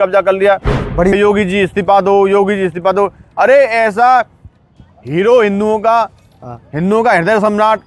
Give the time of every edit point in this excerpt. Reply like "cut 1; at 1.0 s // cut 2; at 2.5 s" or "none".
cut 1; at 1.1 s